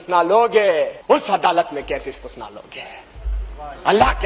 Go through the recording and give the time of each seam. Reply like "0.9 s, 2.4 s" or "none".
1.0 s